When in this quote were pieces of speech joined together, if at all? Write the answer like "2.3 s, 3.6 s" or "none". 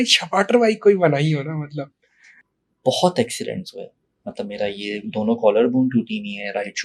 2.3 s